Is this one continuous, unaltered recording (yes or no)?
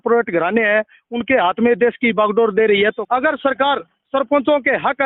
no